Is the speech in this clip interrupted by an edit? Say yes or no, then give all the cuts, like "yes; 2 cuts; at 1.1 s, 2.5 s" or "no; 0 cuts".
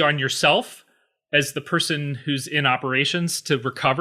no; 0 cuts